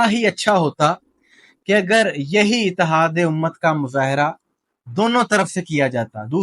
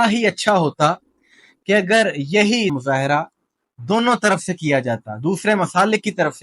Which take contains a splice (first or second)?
second